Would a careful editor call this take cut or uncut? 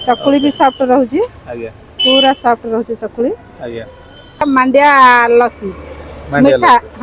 cut